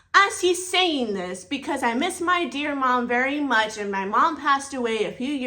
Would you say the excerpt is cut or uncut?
uncut